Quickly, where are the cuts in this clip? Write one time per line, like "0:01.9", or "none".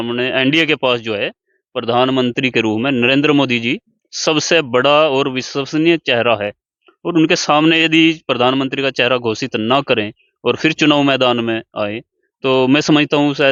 none